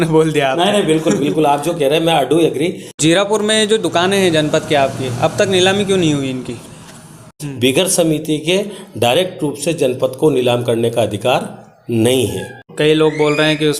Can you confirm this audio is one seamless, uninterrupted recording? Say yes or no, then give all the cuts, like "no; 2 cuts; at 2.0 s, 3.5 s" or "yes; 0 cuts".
no; 3 cuts; at 2.9 s, 7.3 s, 12.6 s